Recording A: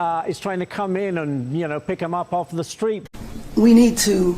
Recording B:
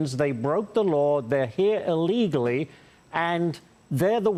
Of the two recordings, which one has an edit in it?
A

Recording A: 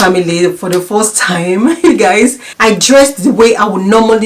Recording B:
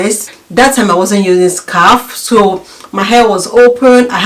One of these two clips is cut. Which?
A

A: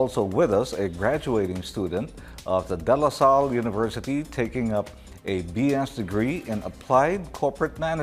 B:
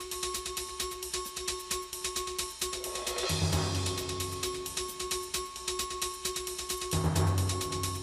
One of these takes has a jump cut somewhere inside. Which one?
A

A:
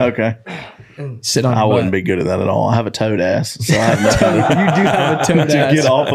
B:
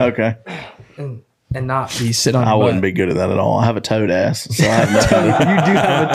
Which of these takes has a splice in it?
A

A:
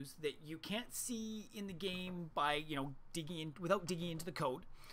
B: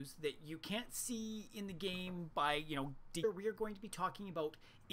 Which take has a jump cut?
A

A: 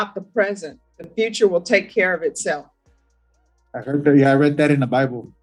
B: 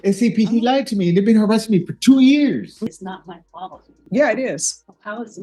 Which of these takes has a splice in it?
B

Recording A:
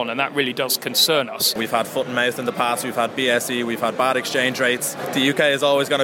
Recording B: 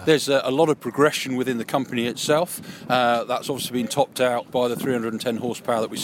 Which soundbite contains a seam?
A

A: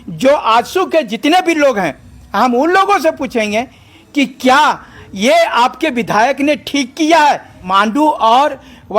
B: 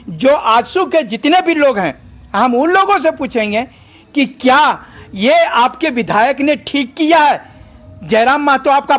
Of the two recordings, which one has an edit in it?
A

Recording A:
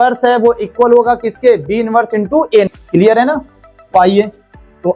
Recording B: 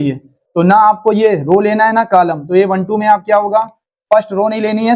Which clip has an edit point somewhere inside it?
A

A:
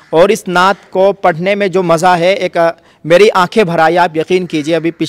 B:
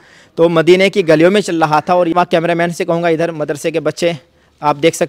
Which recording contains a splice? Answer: B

